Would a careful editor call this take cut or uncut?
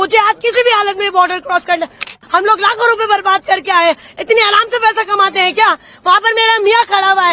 cut